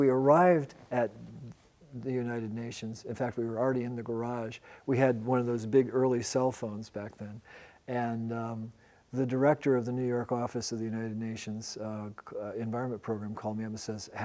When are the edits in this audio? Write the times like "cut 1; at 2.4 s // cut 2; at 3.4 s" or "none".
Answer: cut 1; at 7.6 s